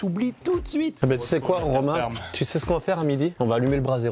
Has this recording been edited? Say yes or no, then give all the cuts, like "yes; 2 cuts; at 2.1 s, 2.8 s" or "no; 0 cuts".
yes; 1 cut; at 1.0 s